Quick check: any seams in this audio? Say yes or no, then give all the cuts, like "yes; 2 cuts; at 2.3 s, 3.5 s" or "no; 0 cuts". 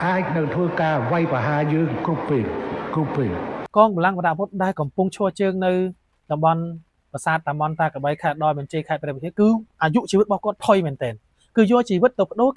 yes; 1 cut; at 3.6 s